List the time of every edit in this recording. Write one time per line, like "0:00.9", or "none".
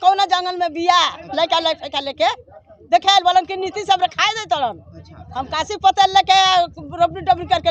none

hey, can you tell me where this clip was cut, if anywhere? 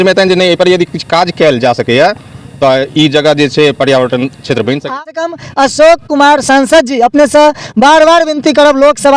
0:05.1

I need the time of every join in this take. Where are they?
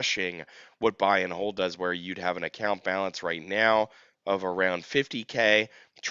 none

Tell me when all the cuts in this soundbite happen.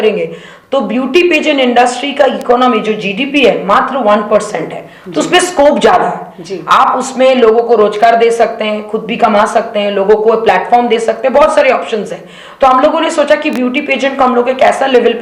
none

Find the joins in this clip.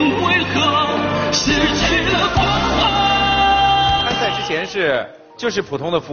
0:04.1
0:05.2

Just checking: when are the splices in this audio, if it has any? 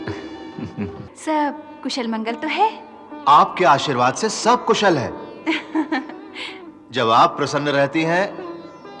0:01.1

